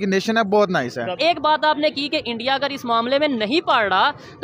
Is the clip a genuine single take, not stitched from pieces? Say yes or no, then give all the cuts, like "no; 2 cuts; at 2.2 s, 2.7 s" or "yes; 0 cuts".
no; 1 cut; at 1.2 s